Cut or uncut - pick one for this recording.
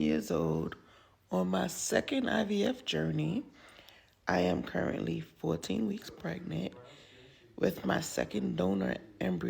cut